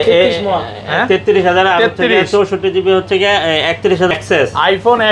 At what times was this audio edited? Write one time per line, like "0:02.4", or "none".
0:04.1